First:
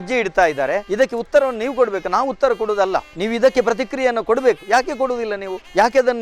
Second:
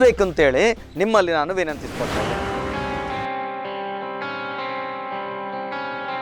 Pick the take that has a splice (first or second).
second